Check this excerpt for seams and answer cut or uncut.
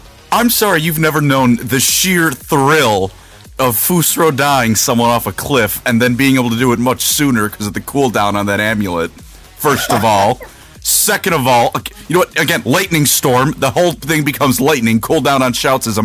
uncut